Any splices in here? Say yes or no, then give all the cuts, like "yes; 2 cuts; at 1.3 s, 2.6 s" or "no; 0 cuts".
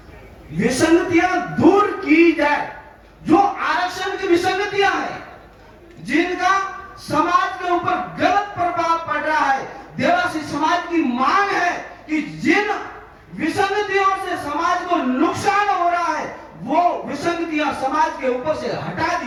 no; 0 cuts